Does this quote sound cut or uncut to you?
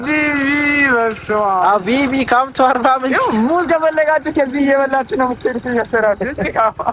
uncut